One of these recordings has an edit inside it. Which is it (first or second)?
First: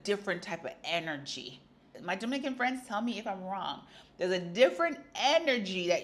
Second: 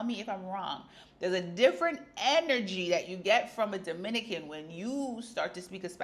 first